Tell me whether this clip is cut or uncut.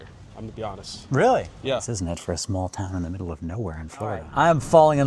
cut